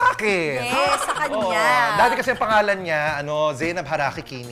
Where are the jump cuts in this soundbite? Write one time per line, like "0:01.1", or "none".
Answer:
none